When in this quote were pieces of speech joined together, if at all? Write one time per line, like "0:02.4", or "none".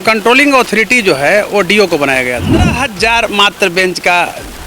0:02.8